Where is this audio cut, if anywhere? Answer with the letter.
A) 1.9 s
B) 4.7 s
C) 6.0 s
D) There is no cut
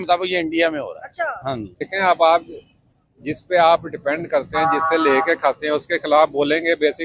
A